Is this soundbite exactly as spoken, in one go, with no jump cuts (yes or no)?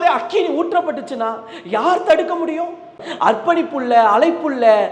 no